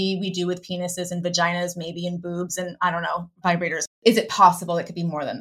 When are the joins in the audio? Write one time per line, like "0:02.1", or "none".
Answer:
0:03.7